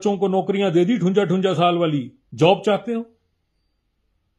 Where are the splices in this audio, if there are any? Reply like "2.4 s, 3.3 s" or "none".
2.2 s